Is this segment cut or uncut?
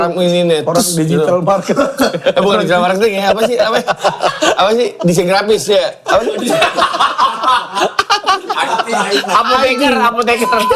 uncut